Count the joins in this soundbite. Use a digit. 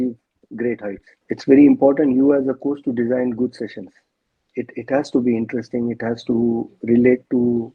1